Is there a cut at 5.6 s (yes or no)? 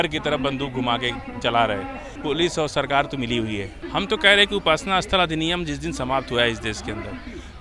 no